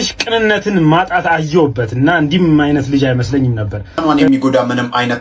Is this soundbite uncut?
no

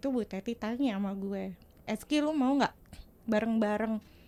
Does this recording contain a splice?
no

